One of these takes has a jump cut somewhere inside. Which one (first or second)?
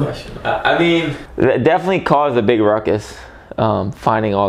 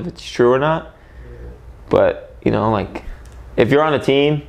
first